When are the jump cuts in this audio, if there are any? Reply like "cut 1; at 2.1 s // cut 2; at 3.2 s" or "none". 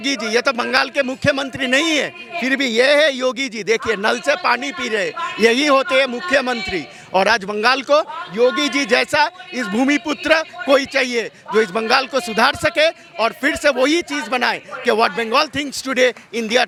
none